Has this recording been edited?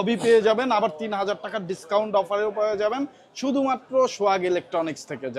no; 0 cuts

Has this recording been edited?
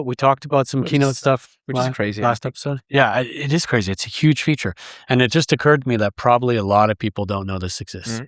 no; 0 cuts

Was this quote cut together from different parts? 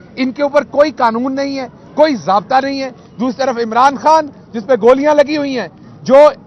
no; 0 cuts

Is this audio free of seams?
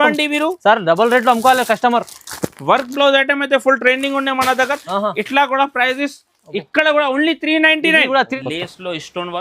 no; 1 cut; at 8.3 s

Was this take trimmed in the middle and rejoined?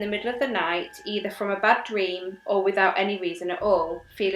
no; 0 cuts

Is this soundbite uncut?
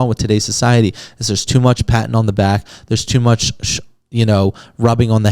yes; 0 cuts

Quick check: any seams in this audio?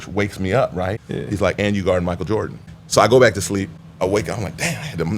yes; 3 cuts; at 1.0 s, 2.7 s, 3.8 s

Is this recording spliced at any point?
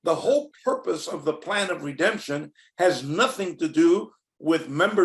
no; 0 cuts

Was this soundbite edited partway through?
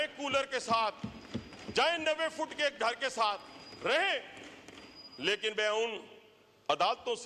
no; 0 cuts

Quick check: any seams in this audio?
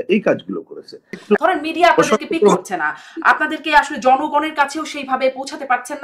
yes; 1 cut; at 1.1 s

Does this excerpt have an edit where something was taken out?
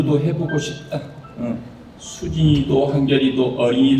no; 0 cuts

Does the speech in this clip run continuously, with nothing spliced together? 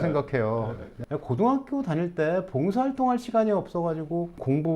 no; 1 cut; at 1.0 s

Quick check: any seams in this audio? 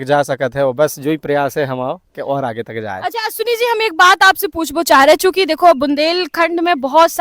no; 0 cuts

